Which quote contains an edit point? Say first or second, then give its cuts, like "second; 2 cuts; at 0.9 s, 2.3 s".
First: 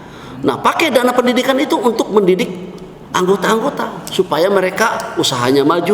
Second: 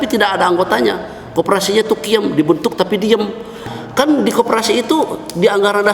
second; 1 cut; at 3.6 s